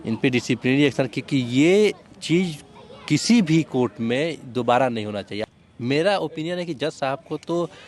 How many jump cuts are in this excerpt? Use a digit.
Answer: 1